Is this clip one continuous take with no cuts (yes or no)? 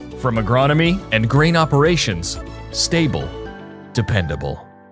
no